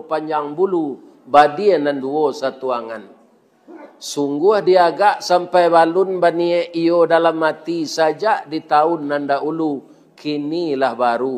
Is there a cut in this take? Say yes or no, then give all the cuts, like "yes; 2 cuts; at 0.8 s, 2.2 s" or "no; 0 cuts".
no; 0 cuts